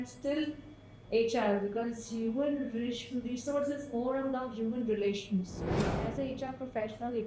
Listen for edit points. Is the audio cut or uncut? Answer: cut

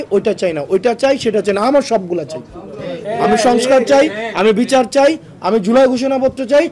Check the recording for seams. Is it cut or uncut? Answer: uncut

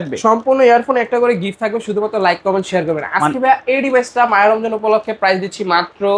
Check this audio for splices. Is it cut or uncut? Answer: uncut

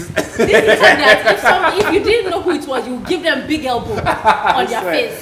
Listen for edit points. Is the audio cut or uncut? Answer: uncut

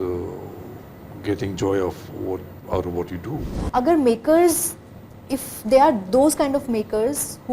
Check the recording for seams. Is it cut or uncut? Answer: cut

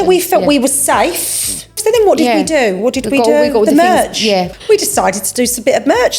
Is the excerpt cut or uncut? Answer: cut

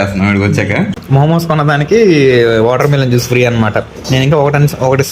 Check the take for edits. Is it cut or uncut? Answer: cut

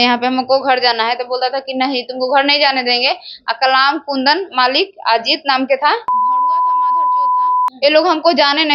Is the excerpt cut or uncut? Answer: cut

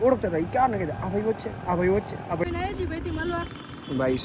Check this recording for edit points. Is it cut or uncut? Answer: cut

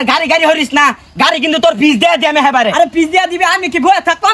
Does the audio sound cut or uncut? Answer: uncut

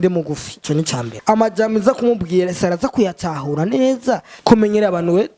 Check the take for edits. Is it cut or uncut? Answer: cut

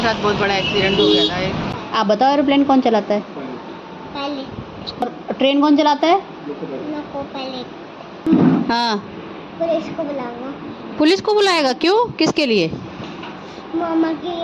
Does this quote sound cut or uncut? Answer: cut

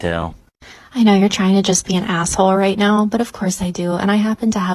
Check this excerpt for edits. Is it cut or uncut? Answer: uncut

